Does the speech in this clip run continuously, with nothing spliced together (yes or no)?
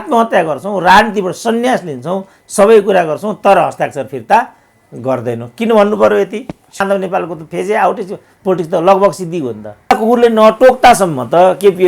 no